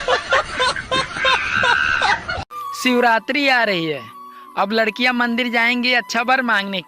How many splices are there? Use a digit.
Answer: 1